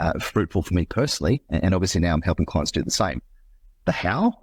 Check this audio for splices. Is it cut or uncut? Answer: uncut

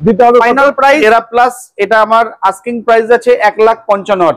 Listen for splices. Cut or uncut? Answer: cut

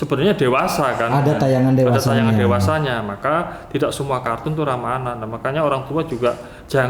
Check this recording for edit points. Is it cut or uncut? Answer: uncut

